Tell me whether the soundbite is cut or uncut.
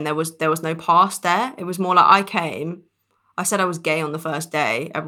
uncut